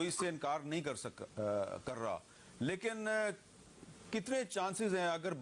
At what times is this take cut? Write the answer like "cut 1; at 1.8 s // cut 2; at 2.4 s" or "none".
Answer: none